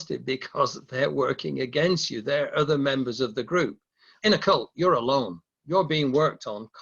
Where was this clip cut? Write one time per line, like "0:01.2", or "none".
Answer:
0:04.1